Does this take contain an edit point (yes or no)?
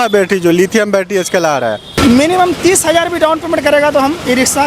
yes